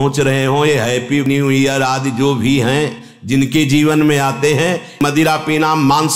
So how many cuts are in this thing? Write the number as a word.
zero